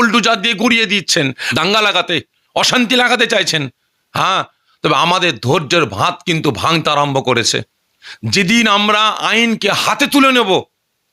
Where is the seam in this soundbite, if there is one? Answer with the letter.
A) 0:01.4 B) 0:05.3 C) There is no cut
A